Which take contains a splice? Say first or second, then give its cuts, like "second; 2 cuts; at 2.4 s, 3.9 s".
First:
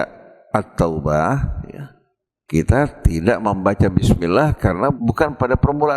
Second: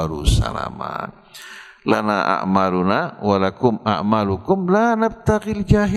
first; 1 cut; at 5.0 s